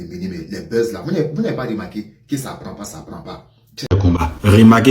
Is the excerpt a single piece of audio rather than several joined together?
no; 1 cut; at 3.9 s

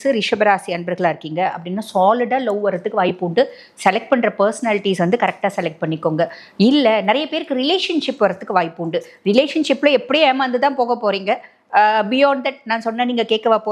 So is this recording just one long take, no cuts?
yes; 0 cuts

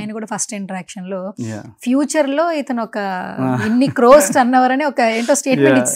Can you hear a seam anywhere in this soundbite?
no; 0 cuts

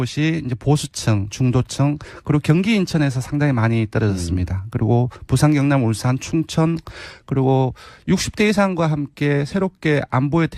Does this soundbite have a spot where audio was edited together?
no; 0 cuts

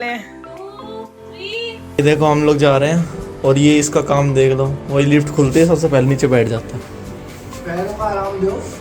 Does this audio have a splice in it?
yes; 1 cut; at 1.8 s

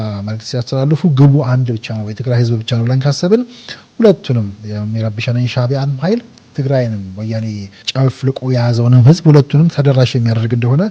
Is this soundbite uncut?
no; 3 cuts; at 6.4 s, 7.8 s, 9.7 s

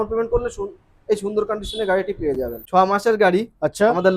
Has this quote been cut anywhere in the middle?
yes; 1 cut; at 2.6 s

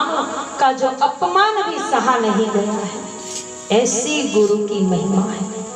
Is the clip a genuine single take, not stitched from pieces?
yes; 0 cuts

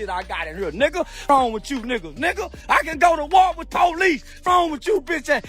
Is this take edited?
yes; 2 cuts; at 1.3 s, 3.8 s

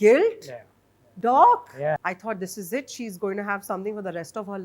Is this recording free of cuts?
no; 1 cut; at 2.1 s

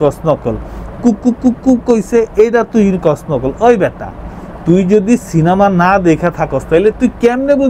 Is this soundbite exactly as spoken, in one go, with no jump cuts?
yes; 0 cuts

